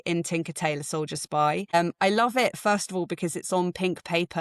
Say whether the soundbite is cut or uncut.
cut